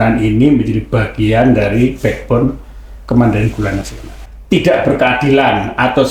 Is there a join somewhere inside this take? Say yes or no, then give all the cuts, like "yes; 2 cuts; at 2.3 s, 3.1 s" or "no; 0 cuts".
yes; 1 cut; at 4.3 s